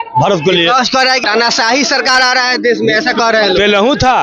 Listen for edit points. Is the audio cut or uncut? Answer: cut